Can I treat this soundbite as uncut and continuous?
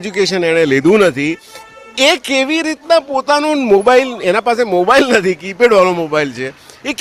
yes; 0 cuts

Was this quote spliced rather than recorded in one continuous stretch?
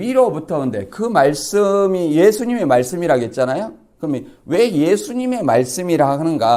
no; 0 cuts

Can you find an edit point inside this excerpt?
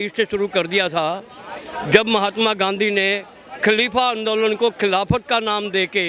no; 0 cuts

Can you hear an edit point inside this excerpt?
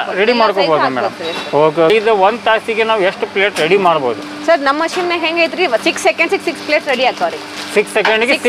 yes; 1 cut; at 1.9 s

